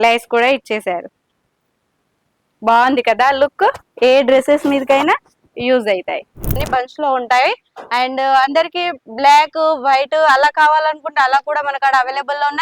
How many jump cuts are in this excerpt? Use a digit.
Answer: 1